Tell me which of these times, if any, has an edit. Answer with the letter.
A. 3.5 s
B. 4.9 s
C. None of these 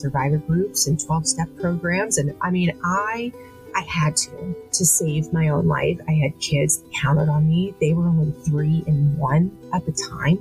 A